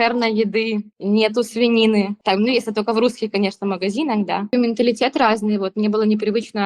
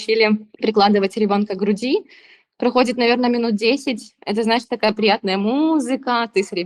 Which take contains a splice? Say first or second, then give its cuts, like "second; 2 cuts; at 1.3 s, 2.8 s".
first; 3 cuts; at 0.9 s, 2.2 s, 4.5 s